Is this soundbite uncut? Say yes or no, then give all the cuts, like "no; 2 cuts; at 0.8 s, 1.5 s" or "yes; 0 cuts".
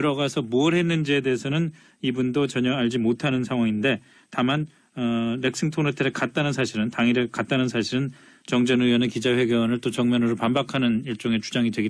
yes; 0 cuts